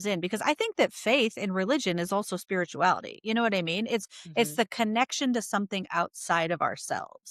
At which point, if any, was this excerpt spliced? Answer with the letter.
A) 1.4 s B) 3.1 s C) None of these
C